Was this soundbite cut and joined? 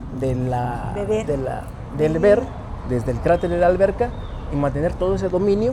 no; 0 cuts

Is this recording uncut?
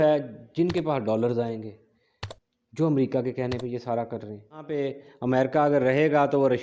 no; 1 cut; at 4.7 s

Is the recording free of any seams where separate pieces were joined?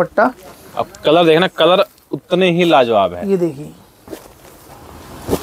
yes; 0 cuts

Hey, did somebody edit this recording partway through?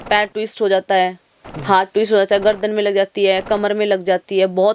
no; 0 cuts

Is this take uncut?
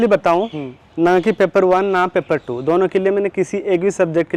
yes; 0 cuts

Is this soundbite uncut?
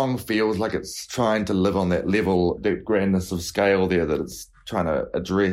no; 2 cuts; at 1.0 s, 2.7 s

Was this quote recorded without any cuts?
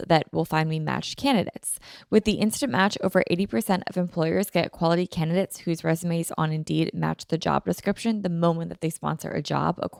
yes; 0 cuts

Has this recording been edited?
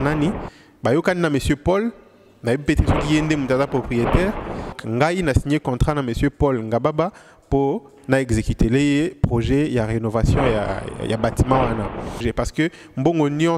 yes; 2 cuts; at 4.8 s, 12.2 s

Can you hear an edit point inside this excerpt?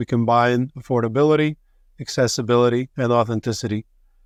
no; 0 cuts

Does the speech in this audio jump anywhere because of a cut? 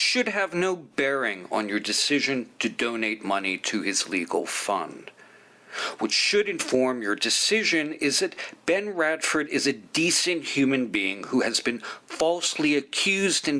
no; 0 cuts

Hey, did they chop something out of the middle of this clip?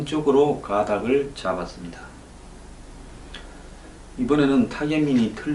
yes; 1 cut; at 3.3 s

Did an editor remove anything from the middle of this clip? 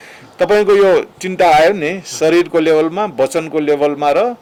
no; 0 cuts

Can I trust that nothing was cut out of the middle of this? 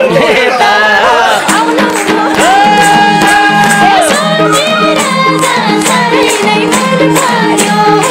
yes; 0 cuts

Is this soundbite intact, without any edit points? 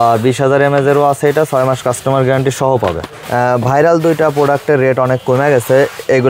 no; 1 cut; at 3.2 s

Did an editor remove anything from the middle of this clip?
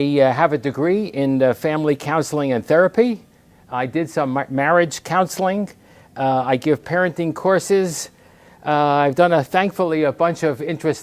yes; 1 cut; at 4.1 s

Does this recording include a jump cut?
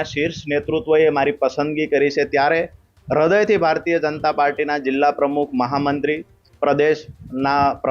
no; 0 cuts

